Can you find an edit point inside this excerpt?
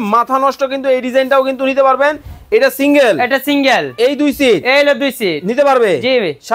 no; 0 cuts

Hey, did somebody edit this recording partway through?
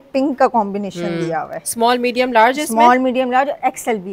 no; 0 cuts

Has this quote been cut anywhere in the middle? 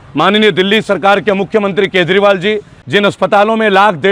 yes; 1 cut; at 2.7 s

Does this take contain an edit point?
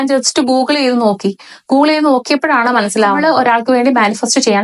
yes; 1 cut; at 3.2 s

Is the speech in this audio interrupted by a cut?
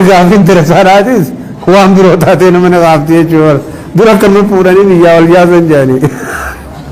no; 0 cuts

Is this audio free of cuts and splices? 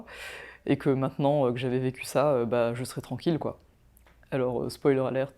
no; 1 cut; at 3.6 s

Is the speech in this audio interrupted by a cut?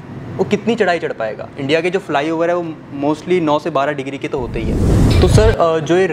yes; 1 cut; at 4.9 s

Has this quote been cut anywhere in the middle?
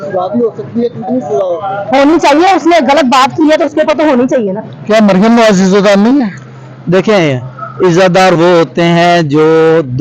yes; 1 cut; at 4.7 s

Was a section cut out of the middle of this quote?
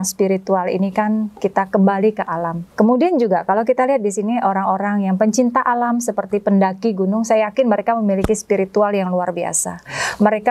yes; 1 cut; at 2.6 s

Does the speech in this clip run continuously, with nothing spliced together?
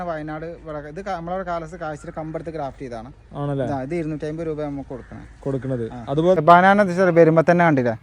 no; 1 cut; at 6.4 s

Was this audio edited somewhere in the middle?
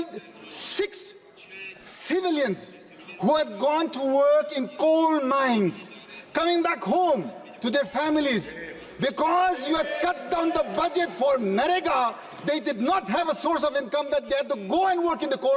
no; 0 cuts

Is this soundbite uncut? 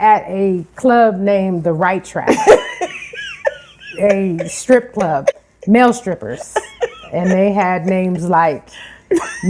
yes; 0 cuts

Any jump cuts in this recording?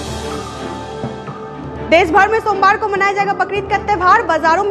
yes; 1 cut; at 1.4 s

